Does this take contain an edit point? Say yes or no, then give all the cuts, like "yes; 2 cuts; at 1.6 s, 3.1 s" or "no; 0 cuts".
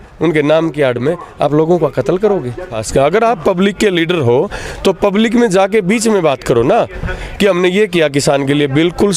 yes; 1 cut; at 2.8 s